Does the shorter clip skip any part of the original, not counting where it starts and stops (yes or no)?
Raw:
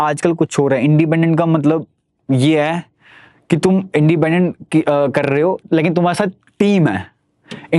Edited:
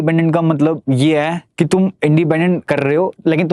yes